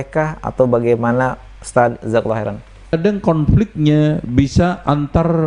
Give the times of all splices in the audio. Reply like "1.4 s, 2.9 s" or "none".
2.9 s